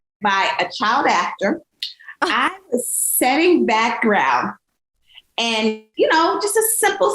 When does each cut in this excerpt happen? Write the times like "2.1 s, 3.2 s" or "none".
5.9 s